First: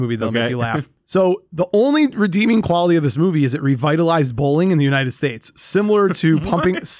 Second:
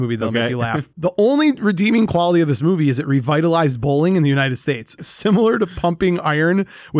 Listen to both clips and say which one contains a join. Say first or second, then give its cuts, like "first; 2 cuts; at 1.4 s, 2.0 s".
second; 2 cuts; at 0.9 s, 5.0 s